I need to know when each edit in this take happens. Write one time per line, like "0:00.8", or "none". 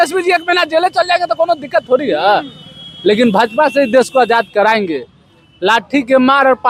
none